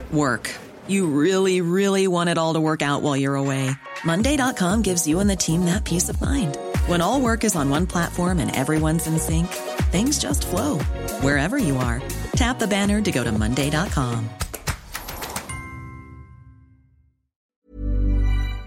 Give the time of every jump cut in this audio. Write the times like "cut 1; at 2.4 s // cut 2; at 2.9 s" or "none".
cut 1; at 17.6 s